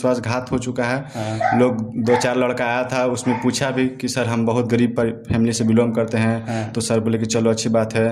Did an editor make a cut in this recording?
no; 0 cuts

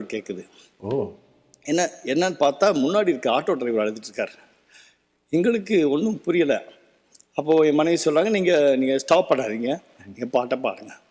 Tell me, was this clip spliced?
no; 0 cuts

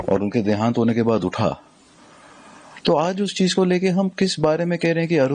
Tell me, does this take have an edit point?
no; 0 cuts

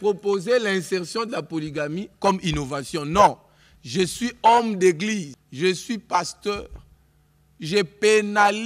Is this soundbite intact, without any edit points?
no; 1 cut; at 5.4 s

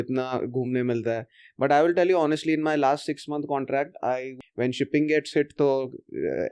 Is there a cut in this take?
yes; 1 cut; at 4.3 s

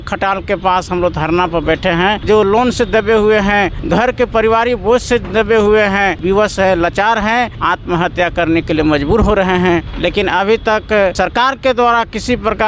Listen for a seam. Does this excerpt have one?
yes; 6 cuts; at 2.2 s, 3.8 s, 6.2 s, 7.6 s, 9.9 s, 11.1 s

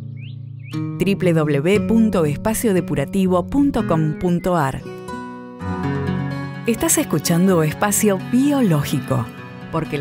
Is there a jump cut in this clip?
yes; 1 cut; at 5.9 s

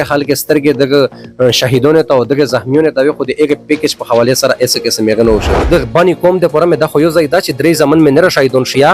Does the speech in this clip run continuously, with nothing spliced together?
no; 1 cut; at 5.6 s

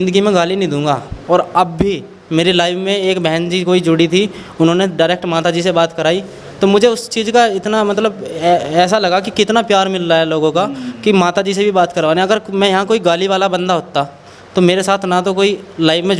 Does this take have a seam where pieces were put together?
no; 0 cuts

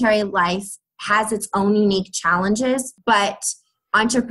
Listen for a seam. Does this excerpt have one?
yes; 1 cut; at 2.9 s

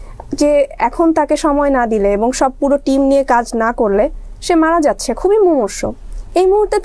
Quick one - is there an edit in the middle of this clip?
no; 0 cuts

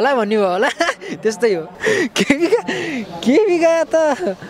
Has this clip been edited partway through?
yes; 1 cut; at 1.7 s

